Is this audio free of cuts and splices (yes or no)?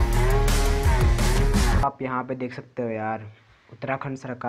no